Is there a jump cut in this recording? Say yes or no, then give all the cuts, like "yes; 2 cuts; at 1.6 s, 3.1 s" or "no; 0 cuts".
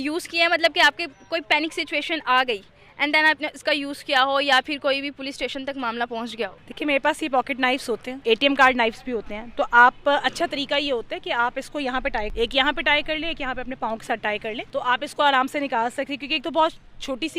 yes; 4 cuts; at 6.6 s, 8.1 s, 12.3 s, 14.6 s